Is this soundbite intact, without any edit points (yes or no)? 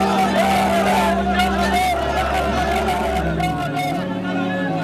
yes